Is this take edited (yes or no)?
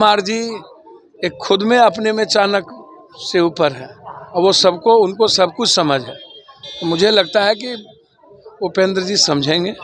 no